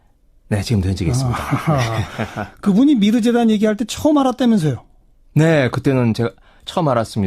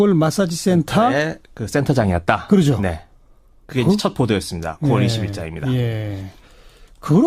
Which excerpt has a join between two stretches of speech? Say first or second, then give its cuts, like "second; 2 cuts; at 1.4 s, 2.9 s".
first; 1 cut; at 3.4 s